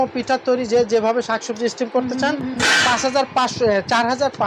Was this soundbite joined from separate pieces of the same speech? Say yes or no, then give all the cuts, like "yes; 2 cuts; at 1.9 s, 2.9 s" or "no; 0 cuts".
no; 0 cuts